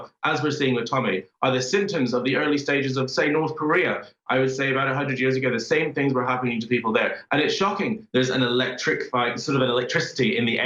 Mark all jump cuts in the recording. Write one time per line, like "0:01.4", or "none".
0:08.0